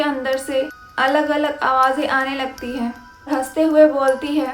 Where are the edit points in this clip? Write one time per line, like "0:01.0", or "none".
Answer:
0:03.3